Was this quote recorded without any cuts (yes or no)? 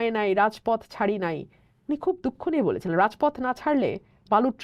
yes